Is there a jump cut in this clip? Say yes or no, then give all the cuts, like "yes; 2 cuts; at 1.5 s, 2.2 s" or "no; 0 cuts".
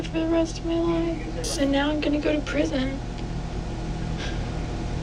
yes; 1 cut; at 1.5 s